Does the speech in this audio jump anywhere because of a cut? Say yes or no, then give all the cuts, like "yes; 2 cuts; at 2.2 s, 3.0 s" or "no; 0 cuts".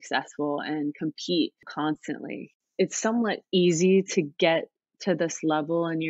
yes; 1 cut; at 2.6 s